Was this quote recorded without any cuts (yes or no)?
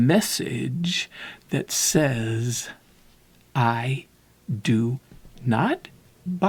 yes